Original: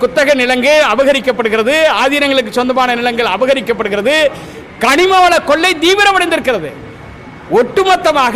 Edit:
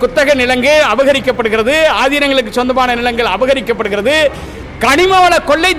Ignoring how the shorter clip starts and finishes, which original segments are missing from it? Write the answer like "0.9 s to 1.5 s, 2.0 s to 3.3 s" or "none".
none